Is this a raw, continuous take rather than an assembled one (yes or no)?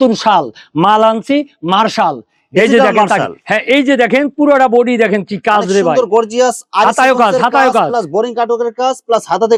yes